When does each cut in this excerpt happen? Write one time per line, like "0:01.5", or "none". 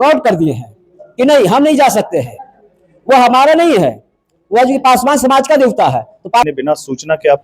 0:06.4

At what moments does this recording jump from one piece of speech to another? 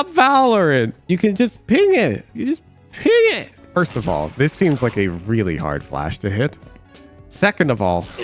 0:03.5

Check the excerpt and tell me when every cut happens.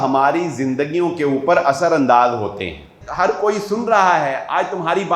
0:03.0

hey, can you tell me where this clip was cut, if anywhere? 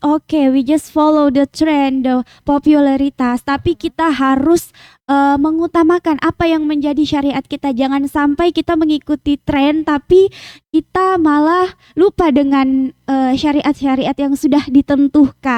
none

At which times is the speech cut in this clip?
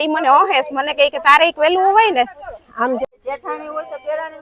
0:03.0

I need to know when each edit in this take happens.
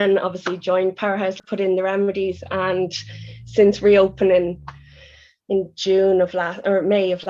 0:01.4

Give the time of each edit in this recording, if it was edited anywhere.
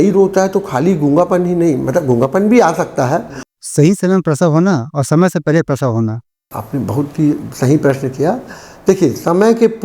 0:03.4
0:06.4

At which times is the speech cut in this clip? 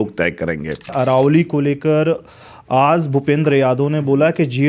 0:00.9

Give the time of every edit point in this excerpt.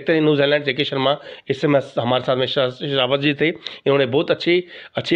none

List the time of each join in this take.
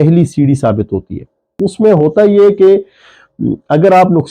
0:01.5

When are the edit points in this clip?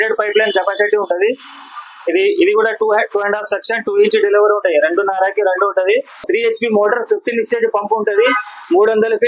0:06.2

